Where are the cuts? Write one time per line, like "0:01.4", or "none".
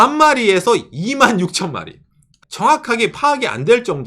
0:02.4